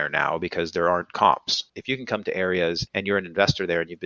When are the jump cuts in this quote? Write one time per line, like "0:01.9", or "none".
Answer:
0:01.7
0:02.9

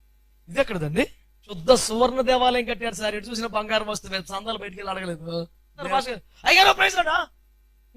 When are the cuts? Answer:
0:01.6
0:05.9

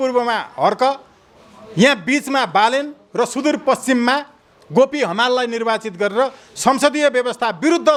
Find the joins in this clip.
none

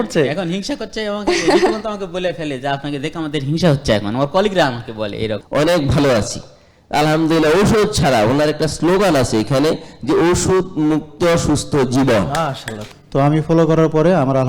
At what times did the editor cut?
0:05.4
0:12.9

